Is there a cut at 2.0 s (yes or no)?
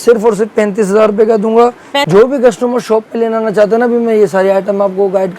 yes